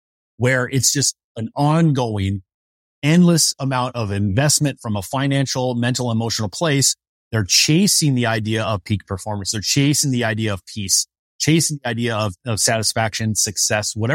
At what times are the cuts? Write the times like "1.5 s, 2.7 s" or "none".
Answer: none